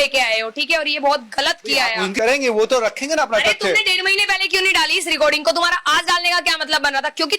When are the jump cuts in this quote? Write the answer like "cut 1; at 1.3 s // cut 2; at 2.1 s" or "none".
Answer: cut 1; at 2.1 s